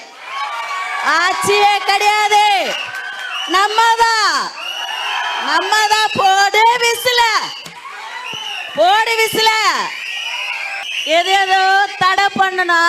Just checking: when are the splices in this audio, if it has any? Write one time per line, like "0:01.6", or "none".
0:10.7